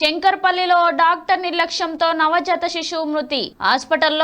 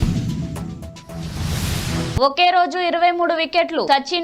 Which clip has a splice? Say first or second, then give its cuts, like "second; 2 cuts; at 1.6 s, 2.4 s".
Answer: second; 1 cut; at 2.1 s